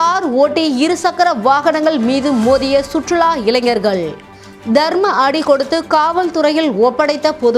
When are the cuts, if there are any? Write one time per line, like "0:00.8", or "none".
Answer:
none